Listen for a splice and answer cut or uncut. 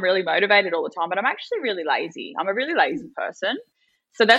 uncut